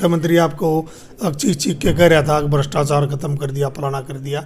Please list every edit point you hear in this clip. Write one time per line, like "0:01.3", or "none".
none